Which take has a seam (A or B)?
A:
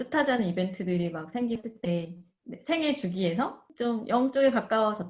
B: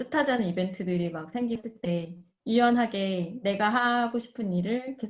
B